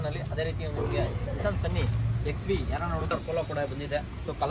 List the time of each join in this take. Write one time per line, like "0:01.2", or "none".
0:03.1